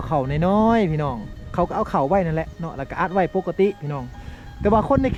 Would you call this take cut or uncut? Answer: uncut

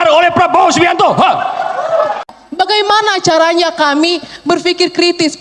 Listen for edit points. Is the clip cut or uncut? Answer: cut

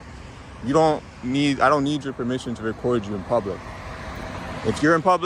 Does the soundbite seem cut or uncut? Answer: uncut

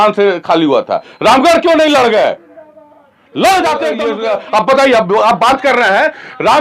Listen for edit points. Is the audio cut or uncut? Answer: cut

